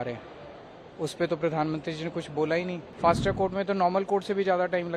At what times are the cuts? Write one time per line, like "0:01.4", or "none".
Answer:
0:02.8

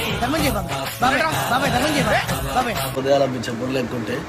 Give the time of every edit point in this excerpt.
0:02.9

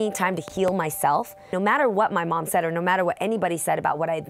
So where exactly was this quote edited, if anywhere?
0:01.5

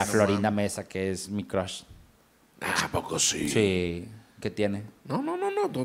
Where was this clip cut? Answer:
none

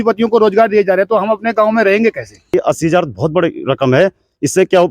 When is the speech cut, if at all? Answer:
0:02.5

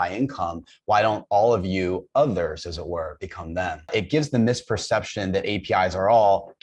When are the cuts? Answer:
0:03.8

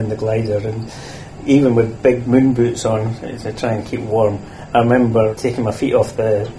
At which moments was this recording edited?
0:02.2
0:05.3

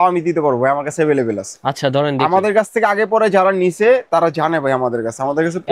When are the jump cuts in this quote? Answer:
none

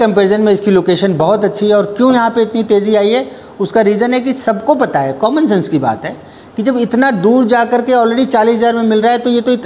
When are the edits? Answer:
none

